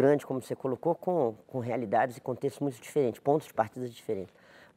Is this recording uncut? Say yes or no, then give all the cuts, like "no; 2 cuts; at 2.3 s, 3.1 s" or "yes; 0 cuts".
yes; 0 cuts